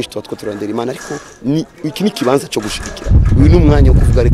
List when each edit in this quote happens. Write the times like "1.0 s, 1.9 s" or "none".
none